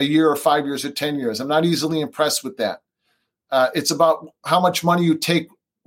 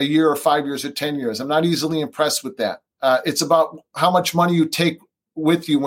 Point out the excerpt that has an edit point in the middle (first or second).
second